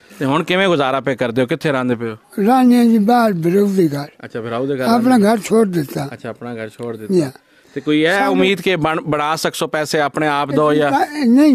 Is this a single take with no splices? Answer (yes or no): yes